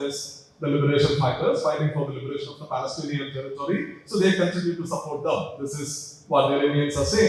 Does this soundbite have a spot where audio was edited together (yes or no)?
no